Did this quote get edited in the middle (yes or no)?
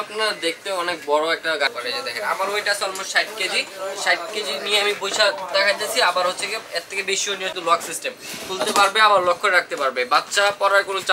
yes